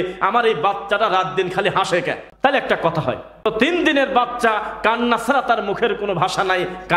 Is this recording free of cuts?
no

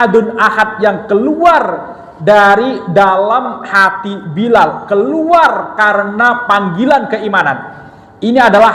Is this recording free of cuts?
yes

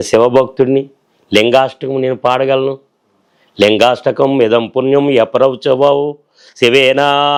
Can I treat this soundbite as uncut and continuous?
yes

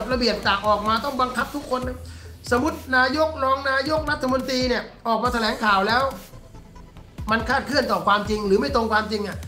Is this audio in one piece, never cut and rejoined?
yes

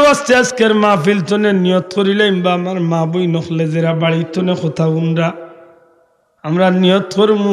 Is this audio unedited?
yes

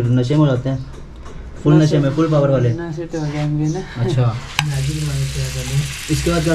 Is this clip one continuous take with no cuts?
no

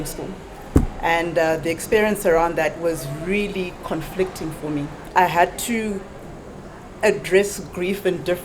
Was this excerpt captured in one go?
no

